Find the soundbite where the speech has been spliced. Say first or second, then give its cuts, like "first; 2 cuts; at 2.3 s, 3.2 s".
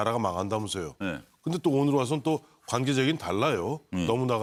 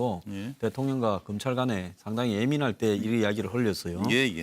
second; 1 cut; at 2.7 s